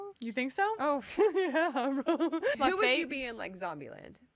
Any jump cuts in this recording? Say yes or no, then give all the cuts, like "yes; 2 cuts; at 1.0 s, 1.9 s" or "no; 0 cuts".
yes; 1 cut; at 2.5 s